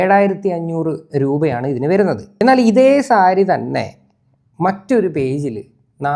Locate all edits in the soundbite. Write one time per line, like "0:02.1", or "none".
0:02.4

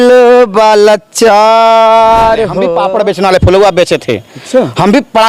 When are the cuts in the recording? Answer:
0:02.6

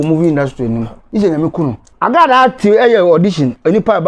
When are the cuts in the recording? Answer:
0:01.0
0:01.8

